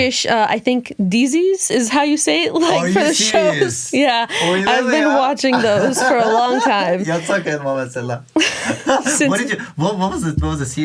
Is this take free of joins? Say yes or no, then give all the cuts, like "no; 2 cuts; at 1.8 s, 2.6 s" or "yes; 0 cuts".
yes; 0 cuts